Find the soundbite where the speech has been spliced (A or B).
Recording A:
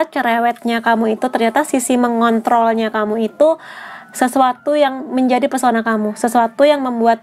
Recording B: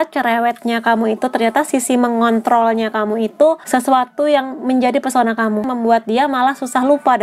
B